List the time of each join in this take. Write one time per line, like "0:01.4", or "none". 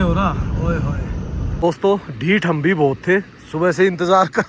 0:01.4